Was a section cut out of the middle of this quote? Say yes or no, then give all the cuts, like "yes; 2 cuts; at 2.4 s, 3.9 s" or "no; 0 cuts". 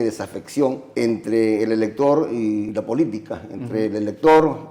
yes; 2 cuts; at 0.8 s, 2.7 s